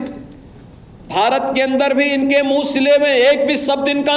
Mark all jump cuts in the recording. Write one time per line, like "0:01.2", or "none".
none